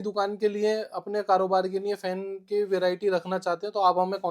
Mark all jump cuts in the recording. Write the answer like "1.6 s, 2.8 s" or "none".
none